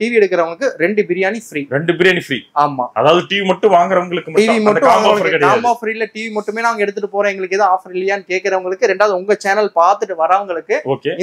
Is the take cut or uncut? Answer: uncut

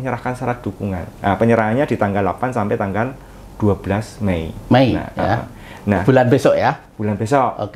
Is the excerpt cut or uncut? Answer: uncut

